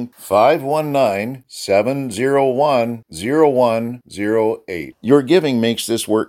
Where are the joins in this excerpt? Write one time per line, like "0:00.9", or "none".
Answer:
none